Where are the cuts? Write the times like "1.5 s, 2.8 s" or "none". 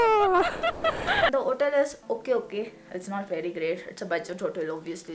1.3 s

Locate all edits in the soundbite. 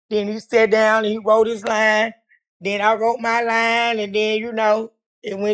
none

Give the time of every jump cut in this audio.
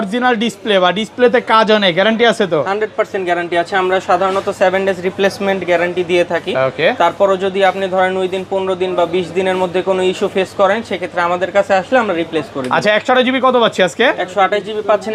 none

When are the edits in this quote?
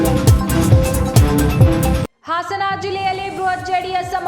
2.0 s

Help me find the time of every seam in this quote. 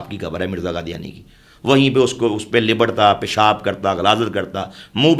none

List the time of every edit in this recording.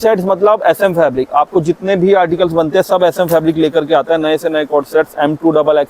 none

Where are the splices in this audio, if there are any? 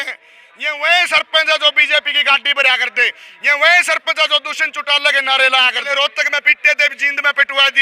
5.8 s

